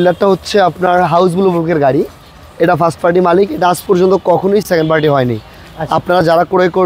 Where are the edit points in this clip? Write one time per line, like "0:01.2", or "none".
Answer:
none